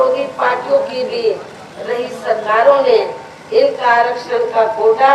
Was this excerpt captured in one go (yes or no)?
yes